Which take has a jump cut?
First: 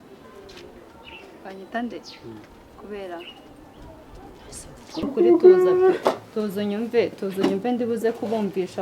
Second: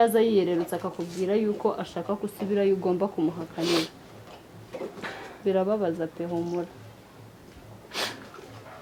first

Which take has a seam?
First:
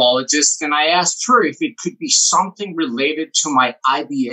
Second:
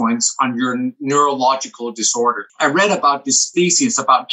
second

